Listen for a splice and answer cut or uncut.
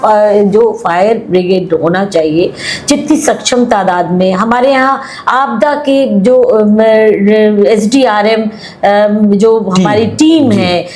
uncut